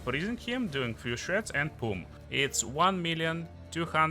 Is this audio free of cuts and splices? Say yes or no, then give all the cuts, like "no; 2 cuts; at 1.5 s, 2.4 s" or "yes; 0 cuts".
no; 1 cut; at 2.1 s